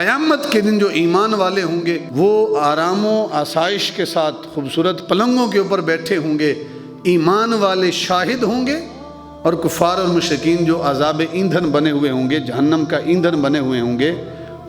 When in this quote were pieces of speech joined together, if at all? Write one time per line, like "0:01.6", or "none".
0:02.0